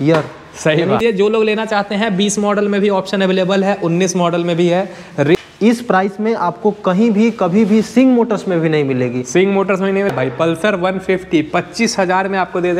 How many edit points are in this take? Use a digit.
3